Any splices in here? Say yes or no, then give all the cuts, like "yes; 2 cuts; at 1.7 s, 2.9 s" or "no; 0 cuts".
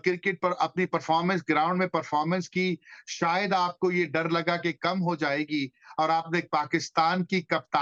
no; 0 cuts